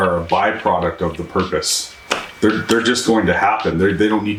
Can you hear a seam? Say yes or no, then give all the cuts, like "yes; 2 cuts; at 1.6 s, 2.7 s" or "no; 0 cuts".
no; 0 cuts